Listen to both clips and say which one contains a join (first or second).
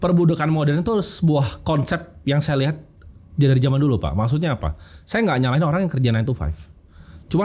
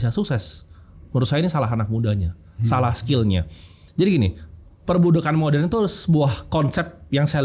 second